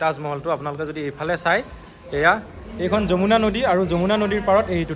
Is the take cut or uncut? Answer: uncut